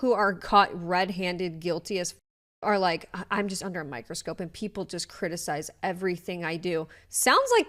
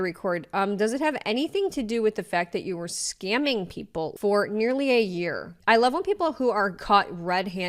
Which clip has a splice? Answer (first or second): second